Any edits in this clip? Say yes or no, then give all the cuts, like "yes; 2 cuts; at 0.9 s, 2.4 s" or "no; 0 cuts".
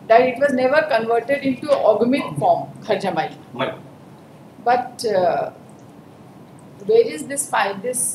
no; 0 cuts